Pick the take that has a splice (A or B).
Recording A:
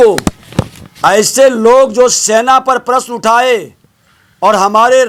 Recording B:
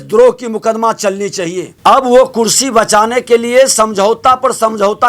B